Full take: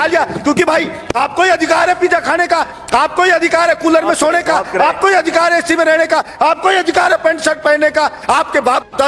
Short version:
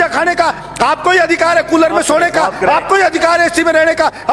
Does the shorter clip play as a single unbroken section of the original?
yes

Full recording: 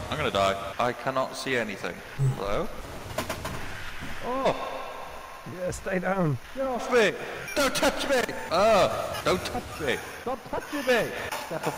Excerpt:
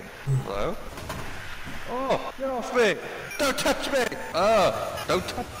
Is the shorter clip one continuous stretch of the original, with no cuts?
no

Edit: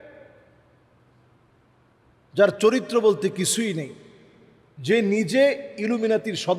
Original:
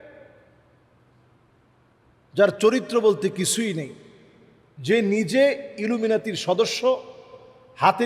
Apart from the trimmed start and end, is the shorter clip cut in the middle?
no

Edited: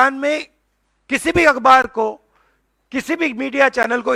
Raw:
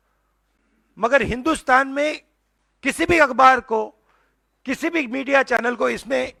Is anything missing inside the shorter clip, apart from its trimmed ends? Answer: no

